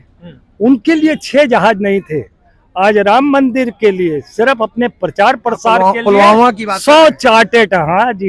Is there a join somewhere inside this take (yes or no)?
no